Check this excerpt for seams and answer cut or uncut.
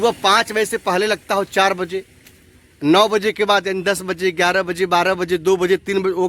uncut